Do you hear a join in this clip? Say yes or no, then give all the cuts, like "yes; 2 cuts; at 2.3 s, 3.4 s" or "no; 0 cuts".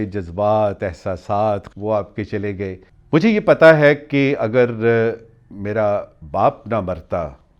yes; 2 cuts; at 1.7 s, 2.9 s